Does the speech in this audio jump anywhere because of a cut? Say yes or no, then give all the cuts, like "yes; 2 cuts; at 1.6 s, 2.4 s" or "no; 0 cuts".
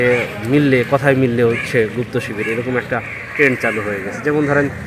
no; 0 cuts